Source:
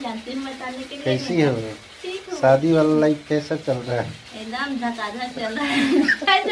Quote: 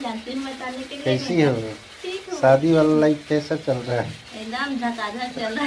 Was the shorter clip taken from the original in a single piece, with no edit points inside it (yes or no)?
yes